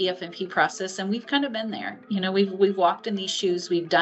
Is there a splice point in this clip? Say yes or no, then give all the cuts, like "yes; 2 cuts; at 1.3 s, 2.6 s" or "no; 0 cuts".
no; 0 cuts